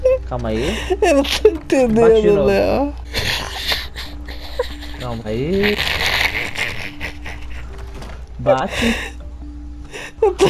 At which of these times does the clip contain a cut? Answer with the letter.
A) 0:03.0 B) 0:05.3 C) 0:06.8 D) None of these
A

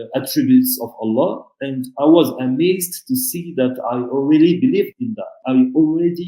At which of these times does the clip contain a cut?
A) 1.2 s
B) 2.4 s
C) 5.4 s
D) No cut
C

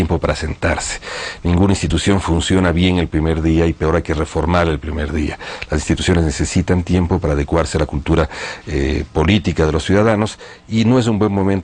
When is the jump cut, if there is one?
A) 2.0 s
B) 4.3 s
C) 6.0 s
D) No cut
B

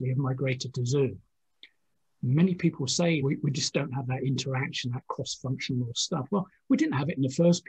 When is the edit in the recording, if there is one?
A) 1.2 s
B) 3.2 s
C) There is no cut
B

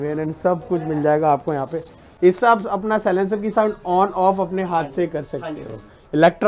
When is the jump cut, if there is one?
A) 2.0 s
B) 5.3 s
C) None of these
A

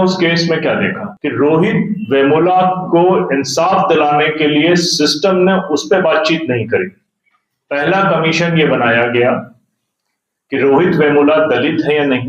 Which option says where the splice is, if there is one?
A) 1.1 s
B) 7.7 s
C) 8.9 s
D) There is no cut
A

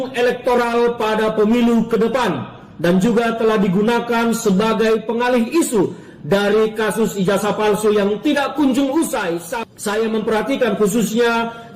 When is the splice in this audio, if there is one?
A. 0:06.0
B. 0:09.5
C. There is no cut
B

